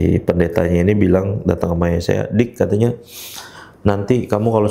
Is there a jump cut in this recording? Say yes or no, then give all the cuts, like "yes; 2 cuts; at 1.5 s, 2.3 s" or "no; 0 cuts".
no; 0 cuts